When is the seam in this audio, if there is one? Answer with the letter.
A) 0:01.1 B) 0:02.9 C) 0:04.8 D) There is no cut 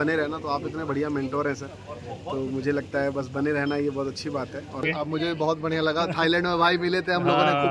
C